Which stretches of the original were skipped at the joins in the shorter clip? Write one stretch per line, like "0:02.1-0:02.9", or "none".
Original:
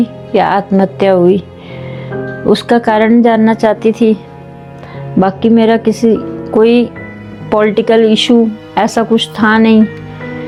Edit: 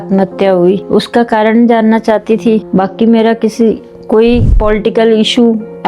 0:01.4-0:02.4
0:04.2-0:05.1
0:07.0-0:07.4

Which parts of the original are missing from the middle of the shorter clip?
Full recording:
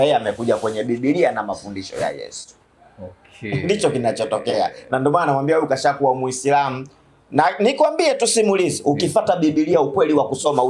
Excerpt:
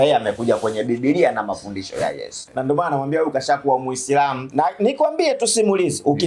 0:02.4-0:04.8
0:06.8-0:07.2

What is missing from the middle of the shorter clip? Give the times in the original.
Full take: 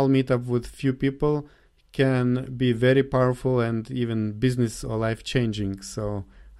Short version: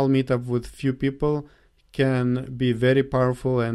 none

